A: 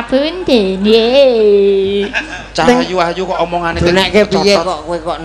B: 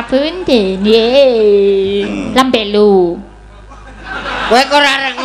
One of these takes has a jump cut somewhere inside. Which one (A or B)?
B